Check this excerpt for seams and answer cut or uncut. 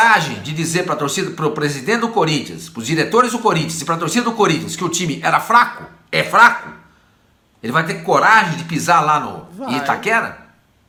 uncut